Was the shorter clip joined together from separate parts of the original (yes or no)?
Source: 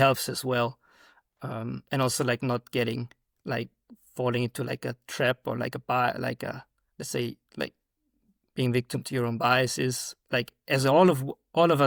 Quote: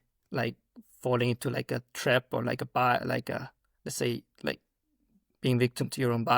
no